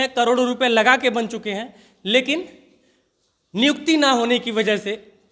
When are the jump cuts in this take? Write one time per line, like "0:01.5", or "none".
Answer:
none